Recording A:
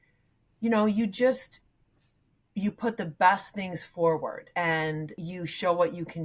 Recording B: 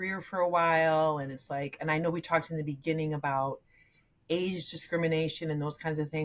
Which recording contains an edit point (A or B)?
A